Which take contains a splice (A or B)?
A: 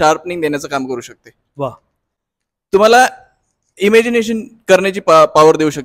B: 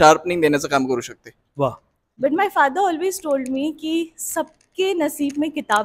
B